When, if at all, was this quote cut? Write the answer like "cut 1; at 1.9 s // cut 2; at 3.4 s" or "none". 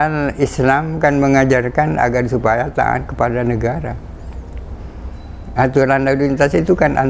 none